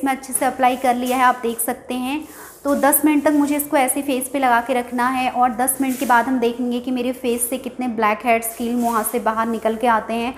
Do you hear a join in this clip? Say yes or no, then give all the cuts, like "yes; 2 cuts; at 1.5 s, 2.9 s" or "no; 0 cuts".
no; 0 cuts